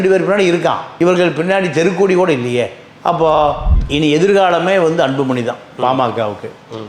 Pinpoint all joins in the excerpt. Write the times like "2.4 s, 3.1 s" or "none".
3.7 s

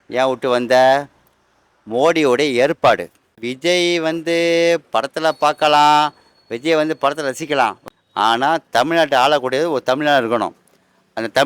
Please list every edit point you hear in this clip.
3.4 s, 7.8 s

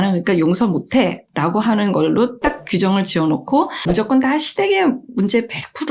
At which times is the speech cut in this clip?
3.8 s

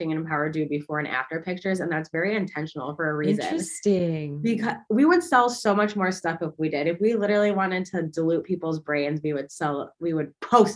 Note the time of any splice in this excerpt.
none

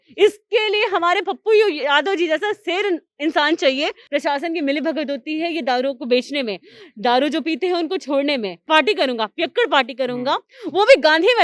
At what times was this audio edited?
4.0 s, 8.6 s

